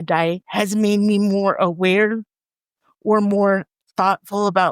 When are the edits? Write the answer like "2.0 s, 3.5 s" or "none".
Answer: 3.7 s